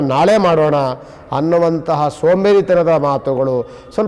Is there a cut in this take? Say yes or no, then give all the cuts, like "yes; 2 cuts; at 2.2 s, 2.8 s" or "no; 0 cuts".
no; 0 cuts